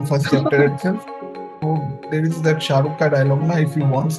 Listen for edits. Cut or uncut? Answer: cut